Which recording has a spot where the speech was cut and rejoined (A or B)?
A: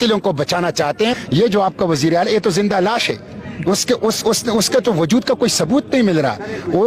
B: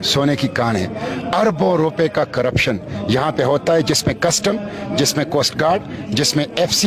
A